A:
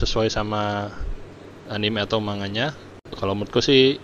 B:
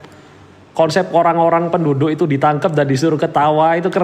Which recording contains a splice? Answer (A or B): A